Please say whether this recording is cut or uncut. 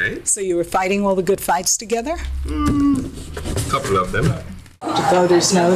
cut